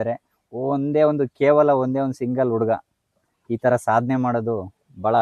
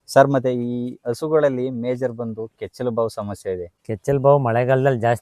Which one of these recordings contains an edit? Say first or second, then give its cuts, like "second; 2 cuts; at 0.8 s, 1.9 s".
second; 1 cut; at 3.7 s